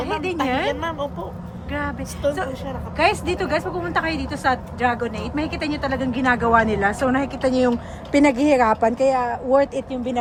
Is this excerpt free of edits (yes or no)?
yes